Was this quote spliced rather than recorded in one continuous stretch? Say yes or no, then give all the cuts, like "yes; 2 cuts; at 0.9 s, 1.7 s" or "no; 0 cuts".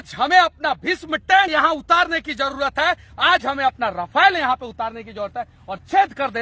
yes; 1 cut; at 1.5 s